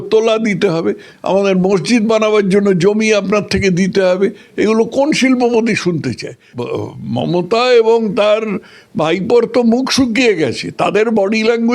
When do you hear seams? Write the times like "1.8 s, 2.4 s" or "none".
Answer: 6.5 s